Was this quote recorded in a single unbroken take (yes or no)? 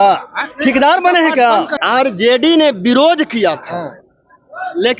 no